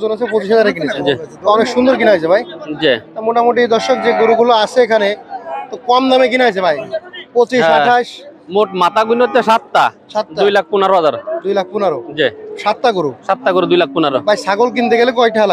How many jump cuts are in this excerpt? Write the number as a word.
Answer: zero